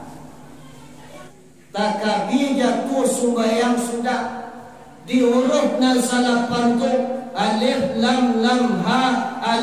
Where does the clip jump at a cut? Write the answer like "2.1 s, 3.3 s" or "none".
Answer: 1.3 s